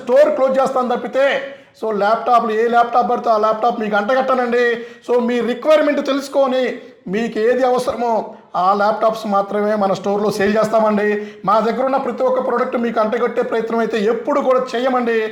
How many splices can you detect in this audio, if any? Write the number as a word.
zero